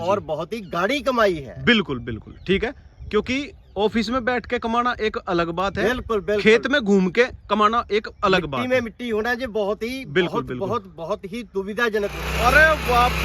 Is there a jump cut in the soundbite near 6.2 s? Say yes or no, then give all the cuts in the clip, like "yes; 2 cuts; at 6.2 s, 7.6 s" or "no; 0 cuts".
no; 1 cut; at 12.2 s